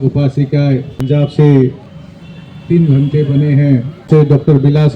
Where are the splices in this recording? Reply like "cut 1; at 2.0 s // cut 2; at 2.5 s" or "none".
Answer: cut 1; at 1.0 s // cut 2; at 4.1 s

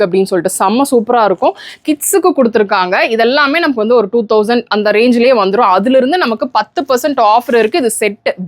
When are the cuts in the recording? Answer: cut 1; at 1.7 s

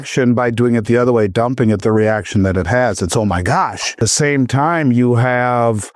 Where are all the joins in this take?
cut 1; at 4.0 s

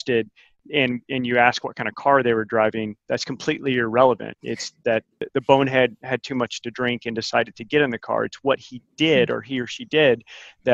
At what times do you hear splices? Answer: cut 1; at 5.2 s

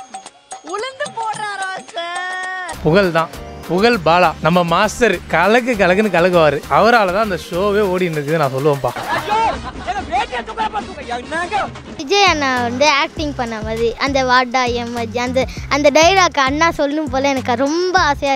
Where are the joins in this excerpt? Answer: cut 1; at 2.7 s // cut 2; at 9.0 s // cut 3; at 11.9 s

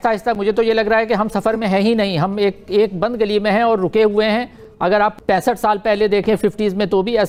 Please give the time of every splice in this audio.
none

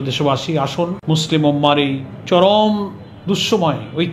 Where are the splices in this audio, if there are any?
cut 1; at 1.0 s // cut 2; at 2.1 s

